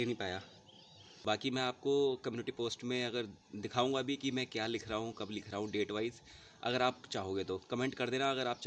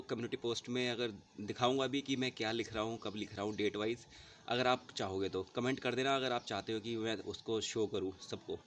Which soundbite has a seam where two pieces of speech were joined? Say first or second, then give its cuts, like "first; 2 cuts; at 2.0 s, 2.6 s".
first; 1 cut; at 1.2 s